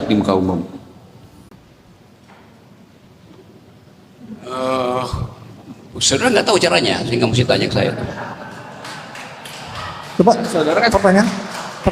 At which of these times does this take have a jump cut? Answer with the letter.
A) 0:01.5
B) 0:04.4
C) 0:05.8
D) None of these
A